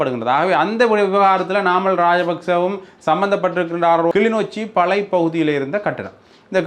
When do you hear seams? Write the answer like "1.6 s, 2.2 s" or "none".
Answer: 4.1 s